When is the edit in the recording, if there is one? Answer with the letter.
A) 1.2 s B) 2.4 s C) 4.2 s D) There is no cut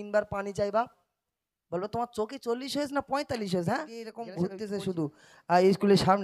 C